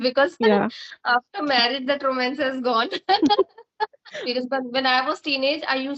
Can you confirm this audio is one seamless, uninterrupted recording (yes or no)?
no